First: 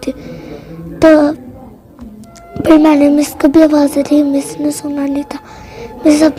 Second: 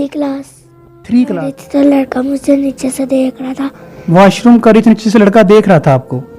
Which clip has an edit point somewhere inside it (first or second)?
second